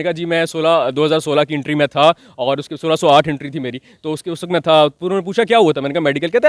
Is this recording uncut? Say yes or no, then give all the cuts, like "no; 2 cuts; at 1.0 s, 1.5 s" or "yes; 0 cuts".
yes; 0 cuts